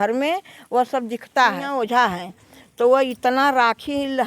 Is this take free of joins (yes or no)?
no